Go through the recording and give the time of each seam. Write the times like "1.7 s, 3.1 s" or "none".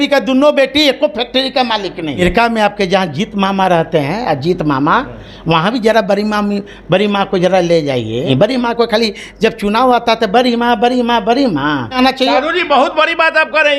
2.2 s, 8.3 s, 12.0 s